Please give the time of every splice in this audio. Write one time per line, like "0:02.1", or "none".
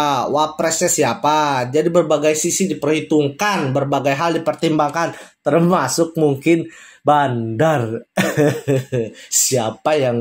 none

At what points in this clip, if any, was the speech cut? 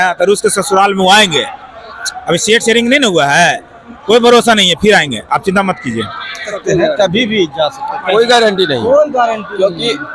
0:06.5

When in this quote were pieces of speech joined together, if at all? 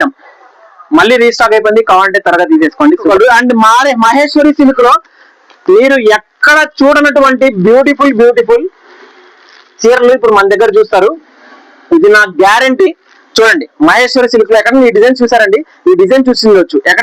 0:03.1

